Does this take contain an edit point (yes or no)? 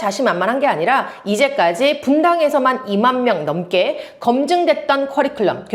no